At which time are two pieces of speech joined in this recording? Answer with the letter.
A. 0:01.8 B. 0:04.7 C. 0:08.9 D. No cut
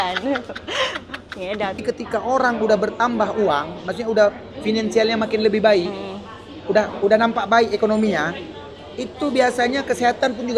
A